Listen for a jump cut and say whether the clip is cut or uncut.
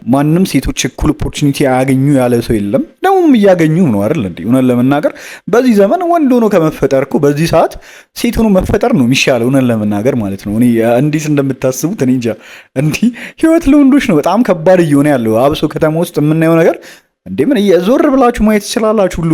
uncut